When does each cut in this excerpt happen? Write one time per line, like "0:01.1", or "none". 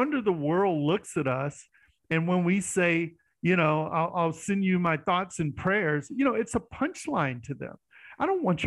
none